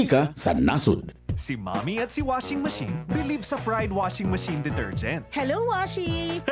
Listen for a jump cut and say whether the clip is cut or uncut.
cut